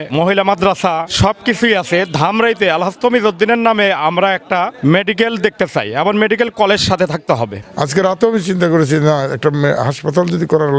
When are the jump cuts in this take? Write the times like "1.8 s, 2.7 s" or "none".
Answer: 7.5 s